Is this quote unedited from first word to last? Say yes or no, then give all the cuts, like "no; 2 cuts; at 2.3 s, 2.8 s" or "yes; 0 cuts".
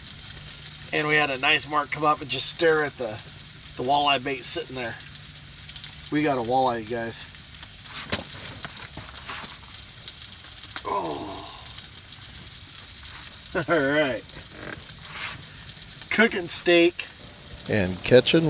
yes; 0 cuts